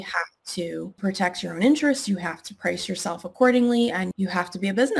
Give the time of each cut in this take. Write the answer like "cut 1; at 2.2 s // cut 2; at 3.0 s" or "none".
cut 1; at 0.9 s // cut 2; at 4.1 s